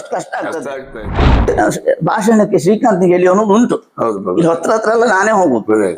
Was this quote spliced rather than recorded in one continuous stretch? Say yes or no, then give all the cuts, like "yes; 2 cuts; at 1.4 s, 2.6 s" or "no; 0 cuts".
yes; 1 cut; at 1.5 s